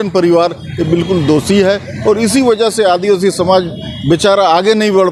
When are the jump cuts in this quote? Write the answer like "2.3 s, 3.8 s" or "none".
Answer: none